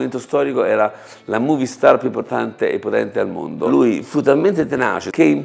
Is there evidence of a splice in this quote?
no; 0 cuts

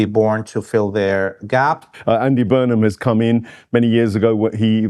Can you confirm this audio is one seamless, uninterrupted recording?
no; 1 cut; at 1.9 s

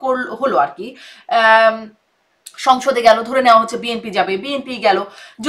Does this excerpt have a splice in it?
no; 0 cuts

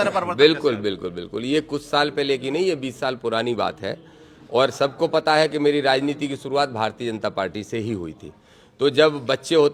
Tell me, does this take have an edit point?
no; 0 cuts

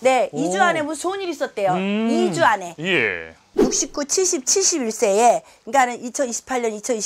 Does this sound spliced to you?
yes; 1 cut; at 3.6 s

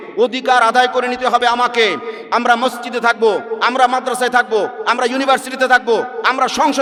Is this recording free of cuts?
yes; 0 cuts

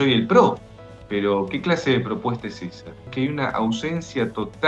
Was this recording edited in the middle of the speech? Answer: yes; 1 cut; at 3.1 s

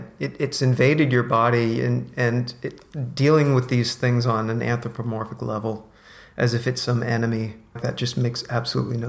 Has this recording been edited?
yes; 1 cut; at 7.8 s

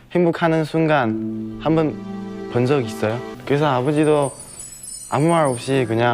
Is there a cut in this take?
yes; 1 cut; at 3.3 s

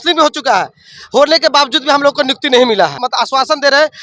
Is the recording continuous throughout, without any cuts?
no; 1 cut; at 3.0 s

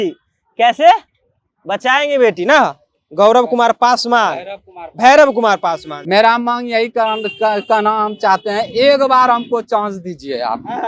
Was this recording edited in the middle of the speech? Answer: yes; 1 cut; at 5.9 s

